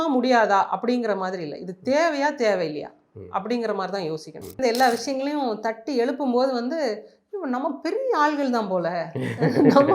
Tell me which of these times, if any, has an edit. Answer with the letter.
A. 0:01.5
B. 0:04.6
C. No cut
B